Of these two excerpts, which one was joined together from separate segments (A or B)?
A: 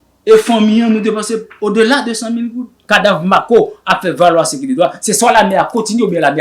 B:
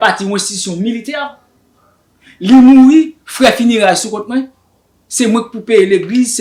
A